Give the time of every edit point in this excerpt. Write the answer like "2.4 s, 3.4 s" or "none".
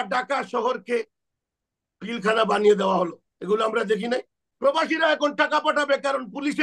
4.4 s